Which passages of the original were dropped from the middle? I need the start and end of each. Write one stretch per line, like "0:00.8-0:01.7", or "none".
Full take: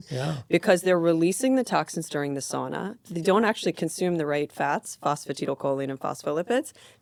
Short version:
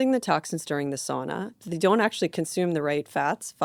none